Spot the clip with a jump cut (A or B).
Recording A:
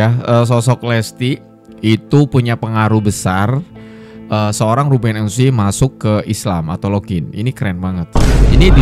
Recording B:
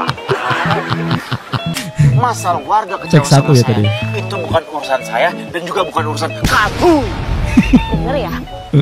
B